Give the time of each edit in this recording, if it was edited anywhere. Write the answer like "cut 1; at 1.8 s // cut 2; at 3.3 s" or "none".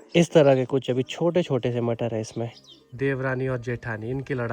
cut 1; at 2.9 s